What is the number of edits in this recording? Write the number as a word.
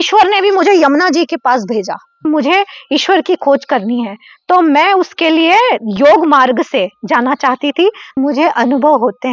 two